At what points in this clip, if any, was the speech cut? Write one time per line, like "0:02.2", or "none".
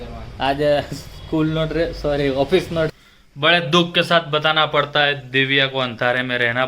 0:02.9